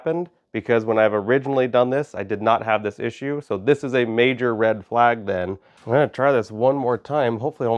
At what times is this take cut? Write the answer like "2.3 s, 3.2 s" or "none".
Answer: 5.7 s